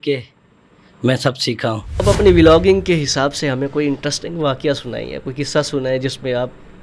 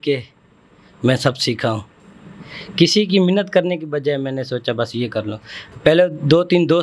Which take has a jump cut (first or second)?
first